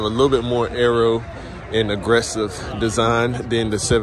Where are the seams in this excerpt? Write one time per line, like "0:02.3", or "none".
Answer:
none